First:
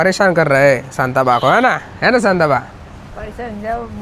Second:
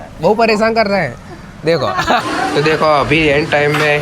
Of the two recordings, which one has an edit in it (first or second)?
second